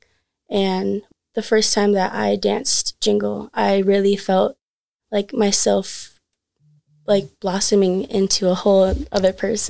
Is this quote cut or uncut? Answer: cut